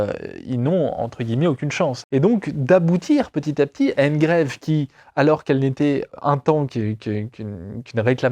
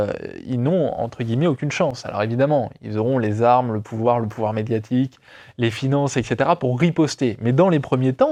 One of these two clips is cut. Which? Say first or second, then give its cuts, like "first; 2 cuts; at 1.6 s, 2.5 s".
first; 2 cuts; at 2.0 s, 6.1 s